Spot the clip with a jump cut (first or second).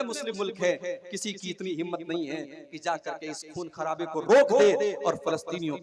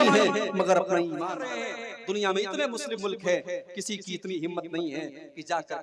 second